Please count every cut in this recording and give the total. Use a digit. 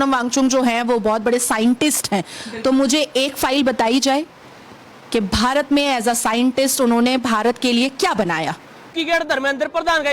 1